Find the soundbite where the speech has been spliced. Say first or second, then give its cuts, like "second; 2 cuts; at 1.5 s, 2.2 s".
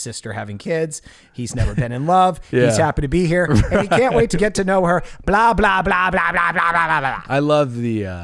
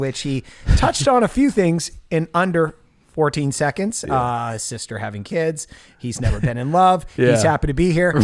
first; 1 cut; at 7.2 s